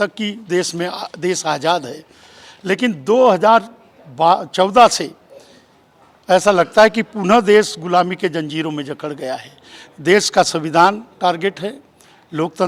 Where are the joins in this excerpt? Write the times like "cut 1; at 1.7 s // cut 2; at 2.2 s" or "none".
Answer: none